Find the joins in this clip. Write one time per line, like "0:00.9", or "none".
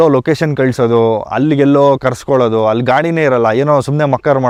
none